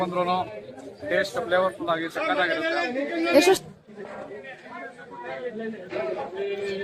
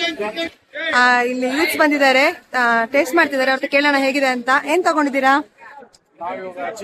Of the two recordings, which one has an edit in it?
first; 1 cut; at 3.5 s

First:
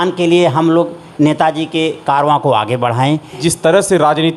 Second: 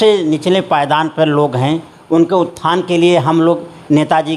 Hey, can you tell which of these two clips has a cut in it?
first; 1 cut; at 3.4 s

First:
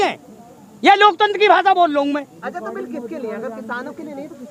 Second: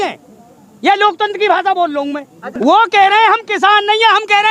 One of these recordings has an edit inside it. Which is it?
second; 1 cut; at 2.6 s

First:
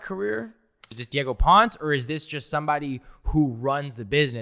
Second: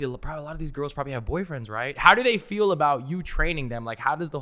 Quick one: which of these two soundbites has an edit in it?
first; 1 cut; at 1.0 s

